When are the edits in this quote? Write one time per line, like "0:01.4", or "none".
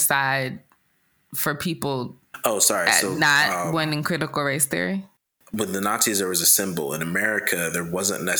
0:05.4